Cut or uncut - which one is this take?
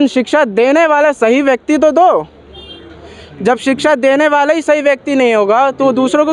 uncut